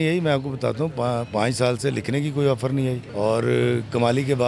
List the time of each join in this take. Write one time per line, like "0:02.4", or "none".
0:03.0